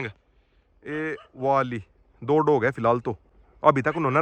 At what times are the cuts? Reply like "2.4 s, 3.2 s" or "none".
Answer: none